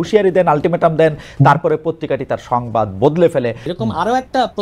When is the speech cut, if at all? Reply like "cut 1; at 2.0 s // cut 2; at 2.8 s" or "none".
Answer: cut 1; at 3.7 s